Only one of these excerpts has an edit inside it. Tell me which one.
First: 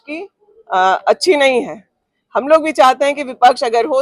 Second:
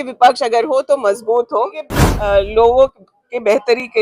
second; 1 cut; at 2.0 s

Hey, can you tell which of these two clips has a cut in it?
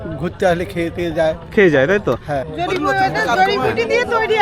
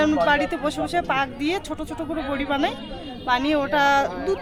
first; 1 cut; at 2.3 s

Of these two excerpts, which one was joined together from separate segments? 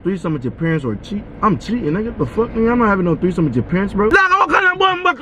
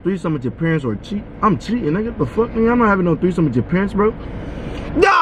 first; 1 cut; at 4.1 s

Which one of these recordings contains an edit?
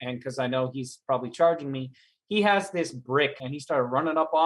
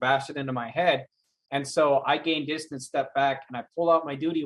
first; 1 cut; at 3.4 s

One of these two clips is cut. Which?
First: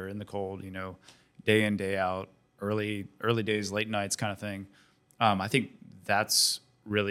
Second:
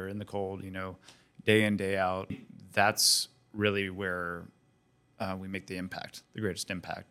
second; 1 cut; at 2.5 s

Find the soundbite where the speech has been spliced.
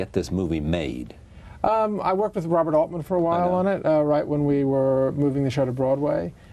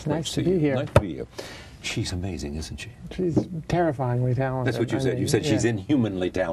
first; 1 cut; at 3.5 s

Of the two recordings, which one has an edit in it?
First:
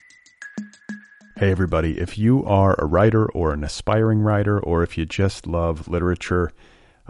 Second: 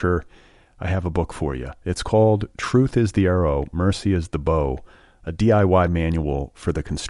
first; 1 cut; at 0.9 s

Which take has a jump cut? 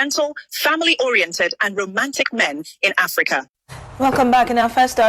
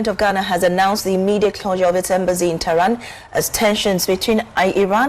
first; 1 cut; at 3.5 s

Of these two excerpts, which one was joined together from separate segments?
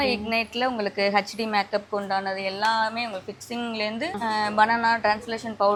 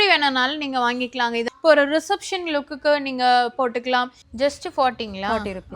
second; 2 cuts; at 1.5 s, 4.2 s

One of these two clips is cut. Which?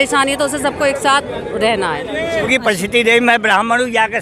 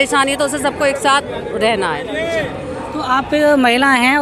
first; 1 cut; at 2.5 s

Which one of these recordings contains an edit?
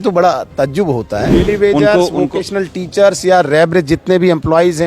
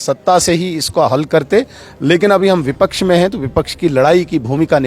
first; 1 cut; at 1.4 s

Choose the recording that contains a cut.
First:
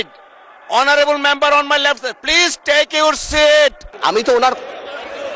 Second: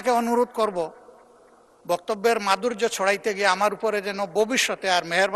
first; 1 cut; at 3.9 s

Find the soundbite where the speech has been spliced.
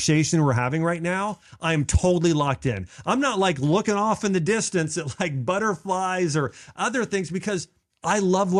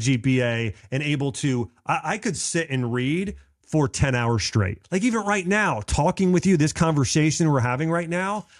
second; 1 cut; at 4.8 s

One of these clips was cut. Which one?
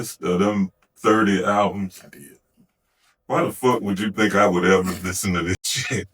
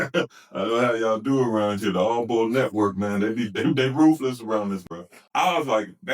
second; 1 cut; at 5.2 s

